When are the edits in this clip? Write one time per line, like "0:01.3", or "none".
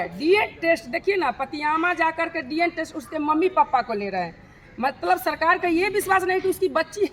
none